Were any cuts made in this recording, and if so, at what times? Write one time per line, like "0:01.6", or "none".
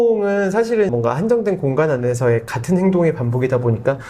0:00.9